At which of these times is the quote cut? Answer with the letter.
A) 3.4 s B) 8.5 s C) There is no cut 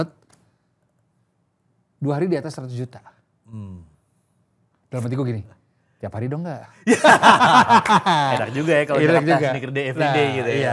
C